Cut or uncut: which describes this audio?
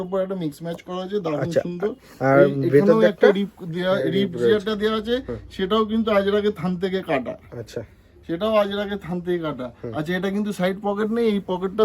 uncut